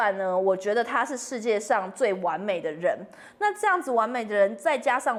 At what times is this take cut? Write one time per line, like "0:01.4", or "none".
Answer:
none

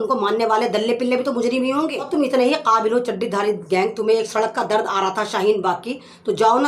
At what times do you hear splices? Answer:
0:02.0

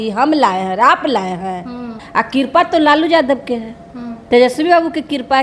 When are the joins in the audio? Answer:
0:02.0

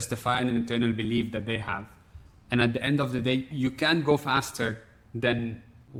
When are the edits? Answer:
none

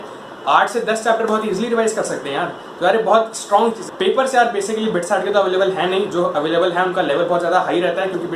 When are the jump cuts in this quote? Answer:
0:03.9

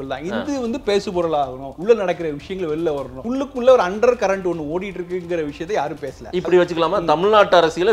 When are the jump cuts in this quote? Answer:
0:01.7
0:03.2
0:06.3

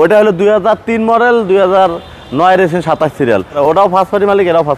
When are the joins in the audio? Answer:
0:03.6

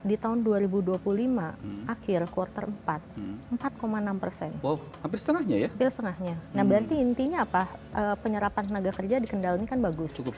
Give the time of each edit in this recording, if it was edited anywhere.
none

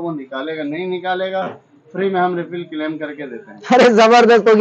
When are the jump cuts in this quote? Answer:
none

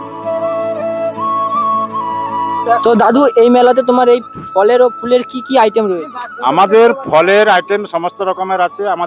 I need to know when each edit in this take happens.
0:02.6

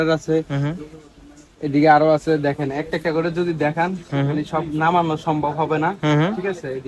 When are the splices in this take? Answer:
none

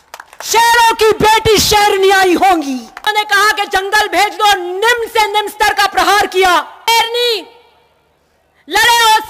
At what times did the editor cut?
0:03.1
0:06.9

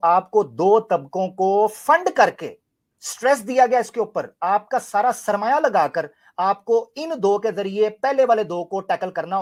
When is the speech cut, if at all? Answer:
none

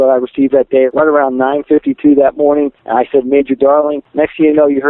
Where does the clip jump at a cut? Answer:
0:00.9
0:02.8
0:04.0

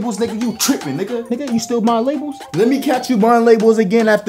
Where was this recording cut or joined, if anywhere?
0:01.3
0:02.5

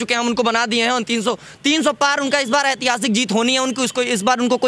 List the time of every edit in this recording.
none

